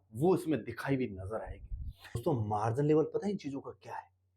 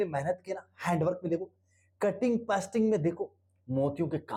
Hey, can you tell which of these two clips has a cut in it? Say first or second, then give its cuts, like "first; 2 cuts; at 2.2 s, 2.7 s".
first; 1 cut; at 2.2 s